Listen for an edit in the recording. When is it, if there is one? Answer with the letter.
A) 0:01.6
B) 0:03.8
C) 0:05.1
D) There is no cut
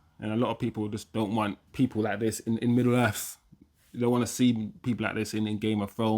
A